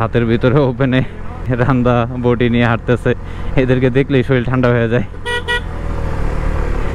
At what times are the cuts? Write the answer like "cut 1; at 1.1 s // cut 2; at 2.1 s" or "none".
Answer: none